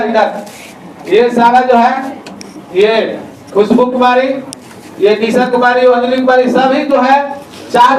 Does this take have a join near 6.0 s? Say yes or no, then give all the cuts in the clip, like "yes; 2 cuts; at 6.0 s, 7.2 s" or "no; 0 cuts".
yes; 1 cut; at 6.0 s